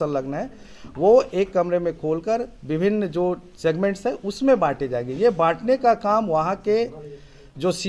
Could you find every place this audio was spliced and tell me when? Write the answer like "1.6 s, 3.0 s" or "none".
none